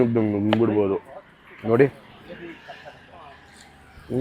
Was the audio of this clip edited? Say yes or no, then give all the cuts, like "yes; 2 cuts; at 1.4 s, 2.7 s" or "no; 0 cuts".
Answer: no; 0 cuts